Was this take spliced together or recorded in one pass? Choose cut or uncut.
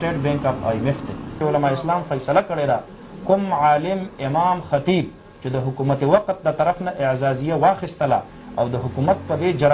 cut